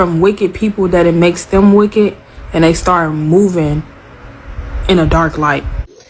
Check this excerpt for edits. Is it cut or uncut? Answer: cut